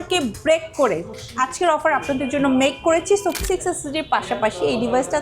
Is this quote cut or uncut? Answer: cut